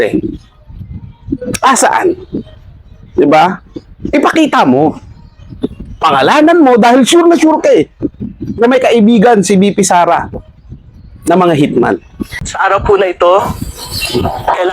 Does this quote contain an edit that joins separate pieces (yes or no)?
yes